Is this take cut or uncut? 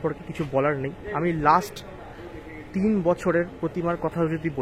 uncut